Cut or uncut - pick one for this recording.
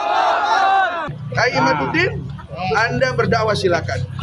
cut